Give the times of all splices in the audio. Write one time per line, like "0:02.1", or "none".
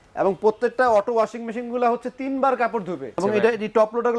0:03.2